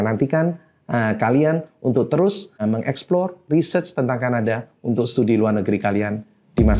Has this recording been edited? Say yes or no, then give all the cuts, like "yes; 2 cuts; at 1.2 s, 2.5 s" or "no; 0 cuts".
yes; 1 cut; at 2.6 s